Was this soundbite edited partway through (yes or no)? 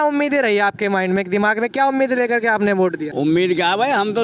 yes